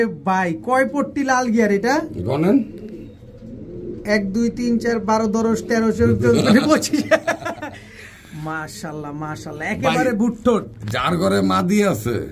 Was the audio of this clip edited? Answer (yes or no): no